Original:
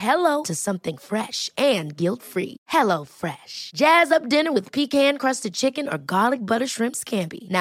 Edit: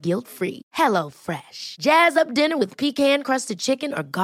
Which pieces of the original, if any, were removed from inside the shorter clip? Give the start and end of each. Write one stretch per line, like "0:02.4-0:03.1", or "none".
none